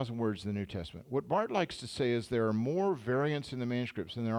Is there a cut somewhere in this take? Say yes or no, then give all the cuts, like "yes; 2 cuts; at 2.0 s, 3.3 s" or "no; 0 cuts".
no; 0 cuts